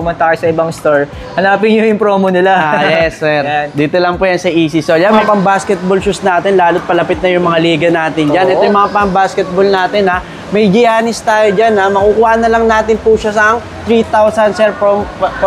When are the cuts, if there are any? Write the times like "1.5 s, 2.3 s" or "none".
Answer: 5.1 s